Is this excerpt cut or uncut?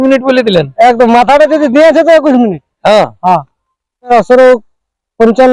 cut